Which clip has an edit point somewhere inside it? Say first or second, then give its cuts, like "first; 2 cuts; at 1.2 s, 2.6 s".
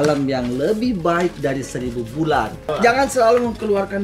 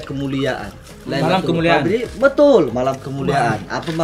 first; 1 cut; at 2.7 s